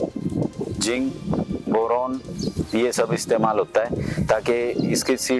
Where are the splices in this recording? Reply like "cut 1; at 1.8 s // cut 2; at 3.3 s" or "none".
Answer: none